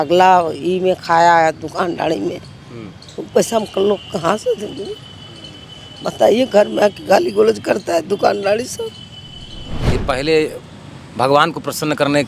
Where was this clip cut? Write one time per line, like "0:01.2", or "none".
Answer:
0:09.9